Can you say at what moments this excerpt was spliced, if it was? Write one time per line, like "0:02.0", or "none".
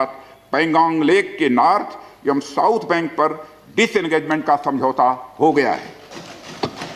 none